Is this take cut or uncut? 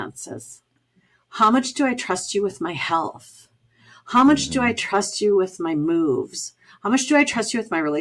uncut